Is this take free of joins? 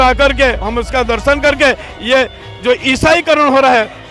yes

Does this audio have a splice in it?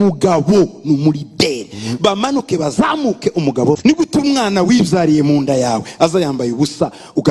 yes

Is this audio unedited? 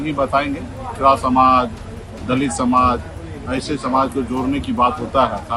no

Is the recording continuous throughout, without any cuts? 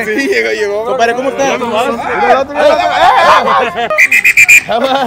no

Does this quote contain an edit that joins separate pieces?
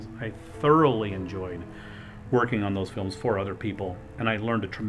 no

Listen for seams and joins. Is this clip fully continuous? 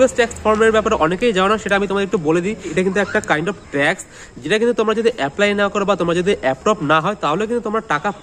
yes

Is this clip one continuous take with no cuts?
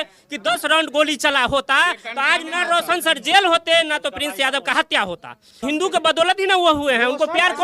no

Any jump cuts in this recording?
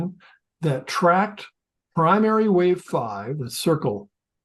no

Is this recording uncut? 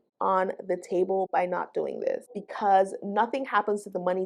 no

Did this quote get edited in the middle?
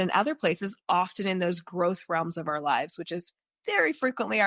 no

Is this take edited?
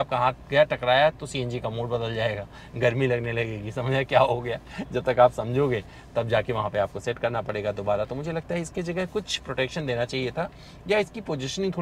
no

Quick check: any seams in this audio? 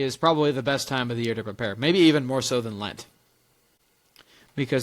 no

